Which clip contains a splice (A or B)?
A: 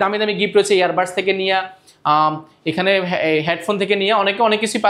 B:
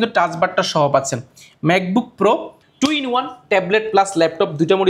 B